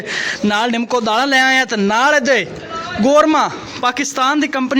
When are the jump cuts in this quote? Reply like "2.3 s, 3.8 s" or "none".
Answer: none